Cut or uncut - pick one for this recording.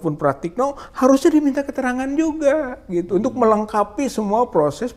uncut